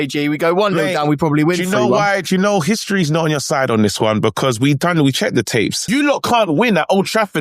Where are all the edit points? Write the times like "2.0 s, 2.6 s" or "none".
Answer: 5.8 s